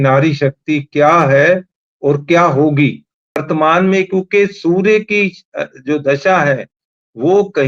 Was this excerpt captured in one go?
no; 1 cut; at 3.4 s

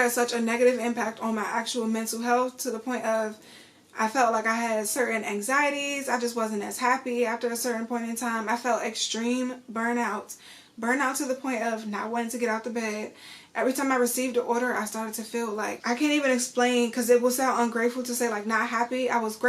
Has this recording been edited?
no; 0 cuts

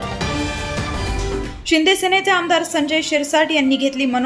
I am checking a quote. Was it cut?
yes; 1 cut; at 1.0 s

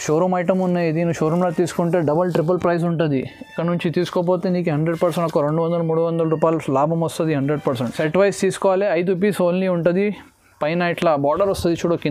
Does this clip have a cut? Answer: no; 0 cuts

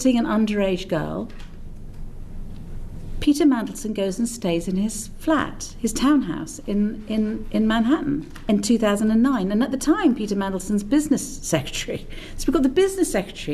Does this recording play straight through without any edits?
no; 1 cut; at 8.3 s

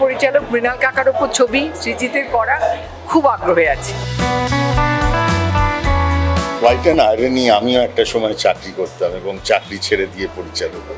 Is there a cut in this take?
no; 0 cuts

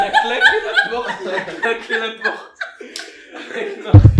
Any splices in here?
no; 0 cuts

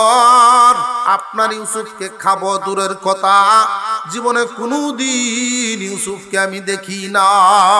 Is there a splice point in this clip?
yes; 1 cut; at 1.0 s

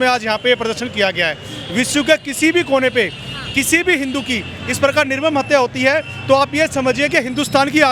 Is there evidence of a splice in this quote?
no; 0 cuts

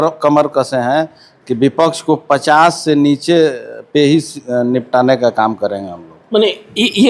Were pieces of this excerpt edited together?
no; 0 cuts

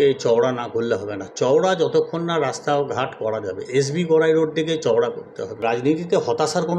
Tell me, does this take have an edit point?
yes; 1 cut; at 5.6 s

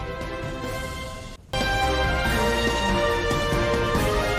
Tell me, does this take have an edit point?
yes; 1 cut; at 1.4 s

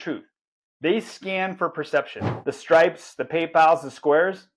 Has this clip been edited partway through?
yes; 1 cut; at 2.2 s

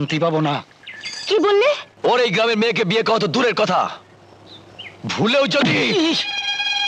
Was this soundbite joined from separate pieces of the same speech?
yes; 1 cut; at 1.9 s

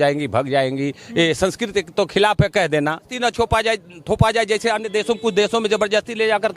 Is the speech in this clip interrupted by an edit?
yes; 1 cut; at 3.1 s

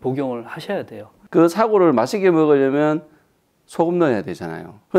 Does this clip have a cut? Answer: yes; 1 cut; at 1.2 s

